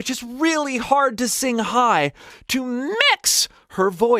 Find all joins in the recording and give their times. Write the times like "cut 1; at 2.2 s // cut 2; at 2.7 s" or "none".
cut 1; at 2.3 s